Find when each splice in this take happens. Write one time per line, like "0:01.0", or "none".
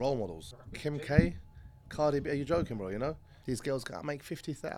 0:01.1
0:03.3